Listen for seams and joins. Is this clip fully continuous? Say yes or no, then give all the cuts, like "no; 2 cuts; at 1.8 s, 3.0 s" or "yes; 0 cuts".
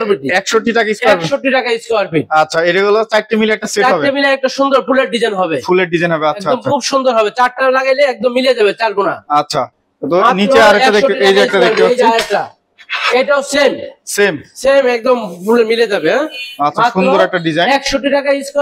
yes; 0 cuts